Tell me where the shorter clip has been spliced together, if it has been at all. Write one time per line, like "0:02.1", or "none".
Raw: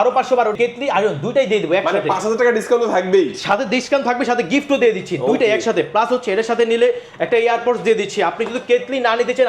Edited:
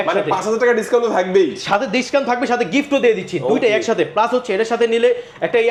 none